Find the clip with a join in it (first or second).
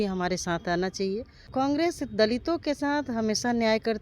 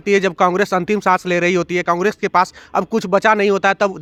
first